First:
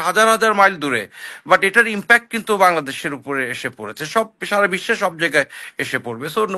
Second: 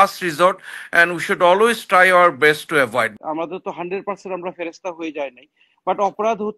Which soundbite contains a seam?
second; 1 cut; at 3.1 s

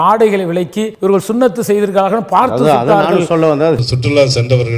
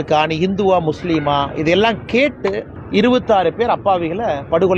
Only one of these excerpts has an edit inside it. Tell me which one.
first; 2 cuts; at 0.9 s, 3.8 s

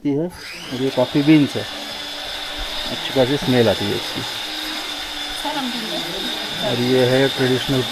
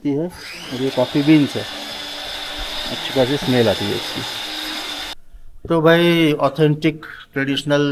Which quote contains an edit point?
second; 1 cut; at 5.3 s

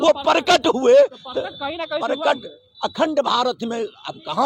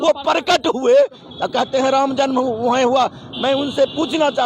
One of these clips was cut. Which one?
second; 1 cut; at 1.2 s

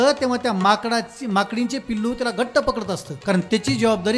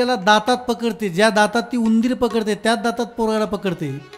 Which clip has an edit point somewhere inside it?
first; 1 cut; at 3.1 s

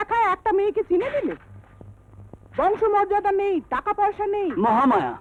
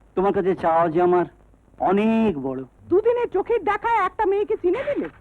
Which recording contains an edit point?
second; 1 cut; at 2.7 s

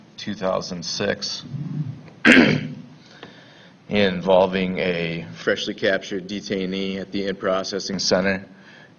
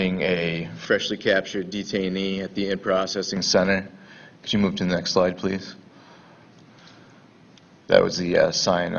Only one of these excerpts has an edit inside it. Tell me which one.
second; 1 cut; at 5.4 s

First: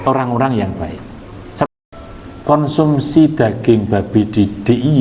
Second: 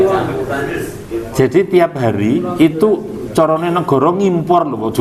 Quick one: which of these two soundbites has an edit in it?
first; 1 cut; at 1.7 s

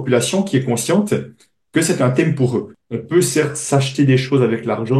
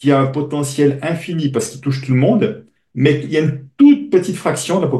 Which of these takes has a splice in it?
first; 1 cut; at 2.7 s

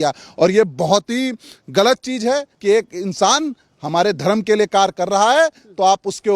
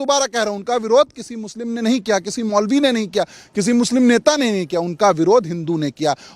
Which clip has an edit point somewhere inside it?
first; 1 cut; at 2.5 s

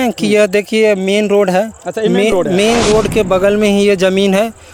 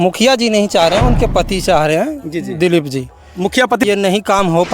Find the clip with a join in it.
second; 1 cut; at 3.8 s

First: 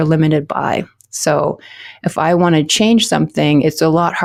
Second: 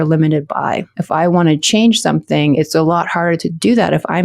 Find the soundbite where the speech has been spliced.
second; 1 cut; at 0.9 s

